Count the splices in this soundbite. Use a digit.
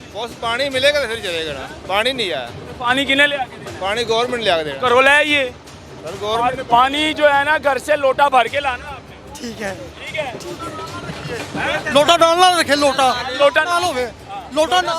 0